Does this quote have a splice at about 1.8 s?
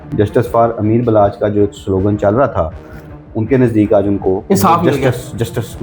no; 1 cut; at 4.4 s

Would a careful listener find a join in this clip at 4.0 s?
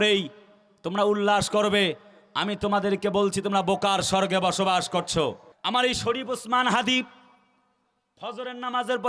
no; 1 cut; at 5.5 s

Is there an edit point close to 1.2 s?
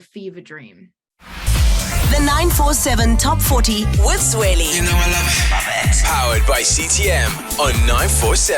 yes; 1 cut; at 1.2 s

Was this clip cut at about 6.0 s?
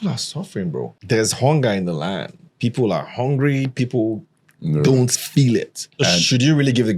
yes; 2 cuts; at 0.9 s, 6.0 s

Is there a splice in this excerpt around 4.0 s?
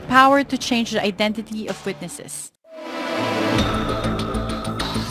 no; 1 cut; at 1.7 s

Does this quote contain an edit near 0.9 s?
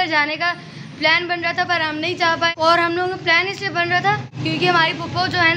no; 2 cuts; at 2.5 s, 4.3 s

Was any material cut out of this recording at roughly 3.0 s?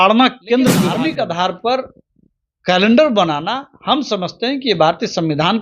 no; 1 cut; at 0.9 s

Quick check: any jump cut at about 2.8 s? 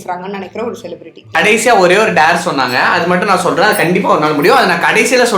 yes; 2 cuts; at 1.4 s, 2.8 s

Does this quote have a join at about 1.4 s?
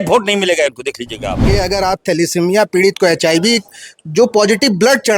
yes; 1 cut; at 1.4 s

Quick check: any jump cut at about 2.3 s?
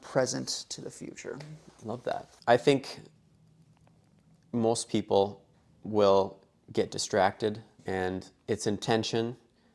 yes; 1 cut; at 2.3 s

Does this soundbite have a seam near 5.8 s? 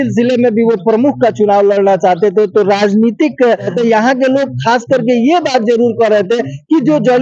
no; 1 cut; at 3.7 s

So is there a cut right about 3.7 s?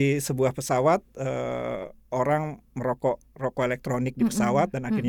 no; 0 cuts

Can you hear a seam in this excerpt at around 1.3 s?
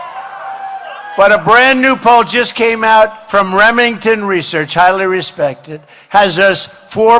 no; 0 cuts

